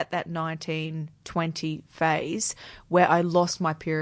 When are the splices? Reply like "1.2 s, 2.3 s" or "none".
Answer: none